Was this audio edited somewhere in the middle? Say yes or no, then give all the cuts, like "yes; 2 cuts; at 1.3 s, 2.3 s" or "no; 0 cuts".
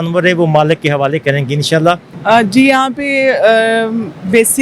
yes; 1 cut; at 2.1 s